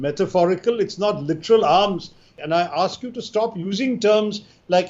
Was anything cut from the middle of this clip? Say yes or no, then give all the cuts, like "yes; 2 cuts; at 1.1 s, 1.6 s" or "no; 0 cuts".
yes; 1 cut; at 2.3 s